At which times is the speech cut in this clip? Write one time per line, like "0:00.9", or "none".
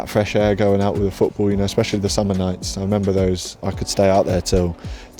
0:03.6

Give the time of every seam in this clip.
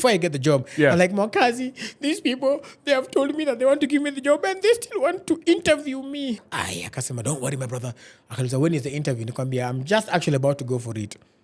0:06.4

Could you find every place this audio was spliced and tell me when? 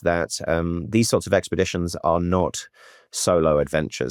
none

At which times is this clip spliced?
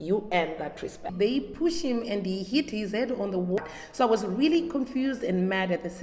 0:01.1
0:03.6

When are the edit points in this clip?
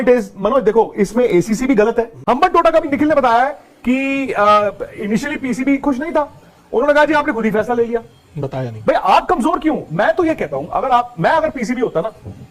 0:02.1

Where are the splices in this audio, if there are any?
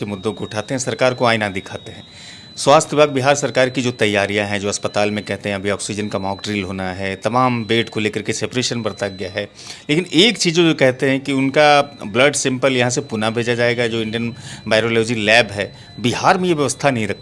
none

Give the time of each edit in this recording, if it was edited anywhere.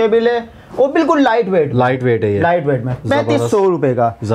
none

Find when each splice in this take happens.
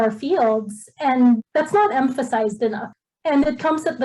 0:01.4
0:02.9

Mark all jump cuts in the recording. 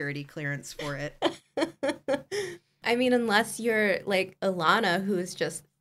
0:01.1

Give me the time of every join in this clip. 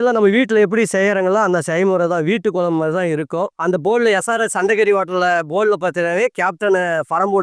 0:03.5

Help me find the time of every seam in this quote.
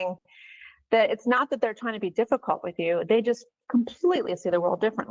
none

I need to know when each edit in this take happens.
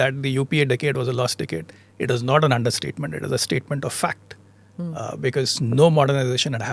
none

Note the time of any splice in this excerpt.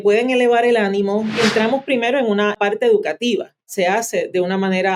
0:01.4
0:02.5
0:03.7

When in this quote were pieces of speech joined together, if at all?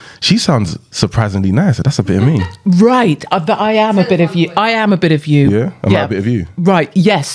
none

